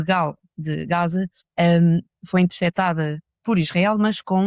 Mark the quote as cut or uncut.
cut